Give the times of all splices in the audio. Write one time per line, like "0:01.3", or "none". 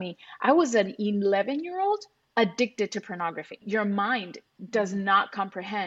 0:03.6